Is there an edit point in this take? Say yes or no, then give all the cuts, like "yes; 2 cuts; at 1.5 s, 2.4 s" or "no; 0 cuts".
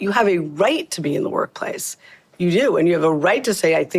no; 0 cuts